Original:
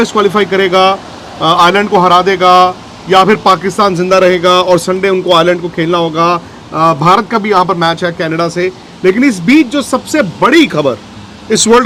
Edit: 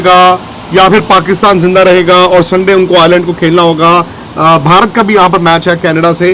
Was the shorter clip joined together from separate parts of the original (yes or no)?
no